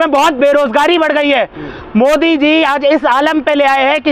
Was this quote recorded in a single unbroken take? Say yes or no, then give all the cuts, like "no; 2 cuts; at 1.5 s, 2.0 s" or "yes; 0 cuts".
yes; 0 cuts